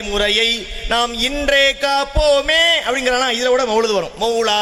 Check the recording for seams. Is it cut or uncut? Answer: uncut